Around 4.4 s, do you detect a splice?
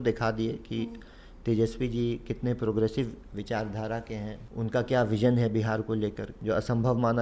yes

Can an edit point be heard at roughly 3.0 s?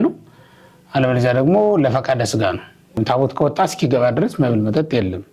yes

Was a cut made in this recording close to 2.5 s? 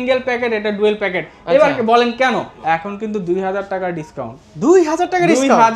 yes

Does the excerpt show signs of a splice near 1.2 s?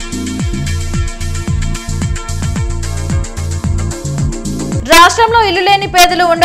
no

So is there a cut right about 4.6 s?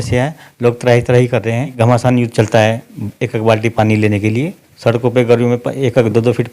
yes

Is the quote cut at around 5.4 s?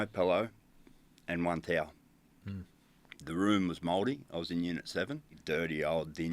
yes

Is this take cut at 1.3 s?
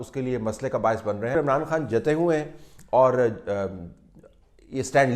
yes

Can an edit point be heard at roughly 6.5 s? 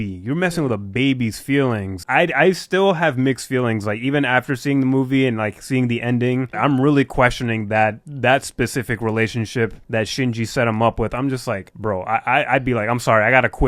yes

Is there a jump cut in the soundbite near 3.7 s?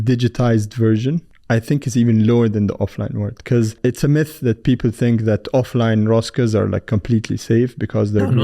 yes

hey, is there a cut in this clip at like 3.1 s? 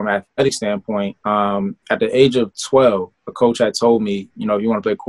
no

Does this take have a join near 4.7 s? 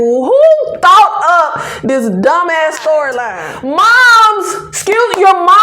no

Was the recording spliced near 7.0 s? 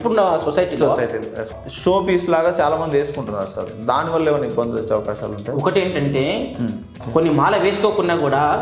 yes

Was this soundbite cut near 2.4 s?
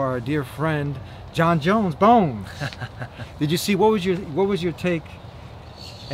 no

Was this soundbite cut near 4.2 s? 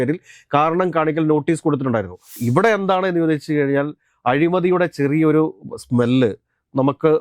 no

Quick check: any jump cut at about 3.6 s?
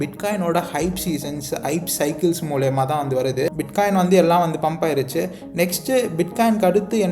yes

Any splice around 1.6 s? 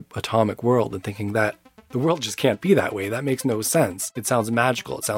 no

